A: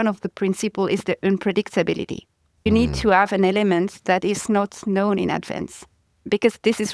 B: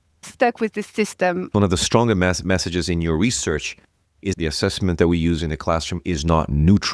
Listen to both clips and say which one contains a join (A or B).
B